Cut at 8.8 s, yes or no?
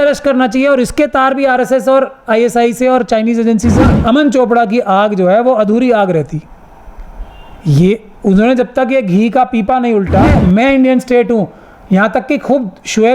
no